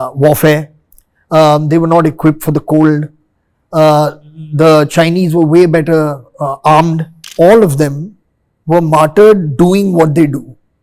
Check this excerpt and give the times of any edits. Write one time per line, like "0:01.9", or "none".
0:07.2